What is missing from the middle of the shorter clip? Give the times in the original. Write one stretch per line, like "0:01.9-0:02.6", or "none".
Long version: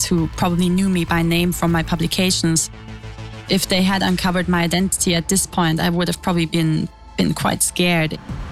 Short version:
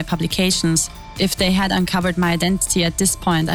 0:02.8-0:03.3